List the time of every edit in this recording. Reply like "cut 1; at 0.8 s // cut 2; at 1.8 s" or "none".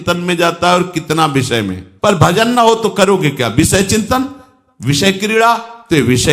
cut 1; at 1.8 s

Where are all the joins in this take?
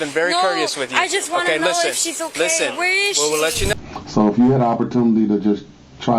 cut 1; at 3.7 s

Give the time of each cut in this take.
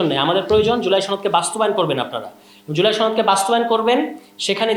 none

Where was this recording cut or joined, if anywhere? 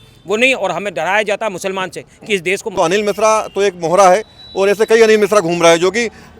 cut 1; at 2.7 s

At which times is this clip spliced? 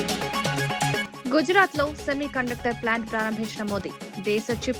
cut 1; at 1.0 s

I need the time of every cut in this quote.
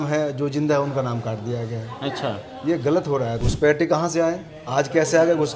cut 1; at 3.4 s

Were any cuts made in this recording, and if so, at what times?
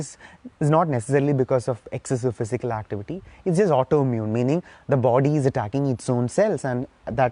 none

